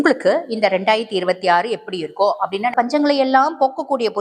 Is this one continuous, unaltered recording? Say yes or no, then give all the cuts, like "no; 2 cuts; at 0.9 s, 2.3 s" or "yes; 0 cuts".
no; 1 cut; at 2.7 s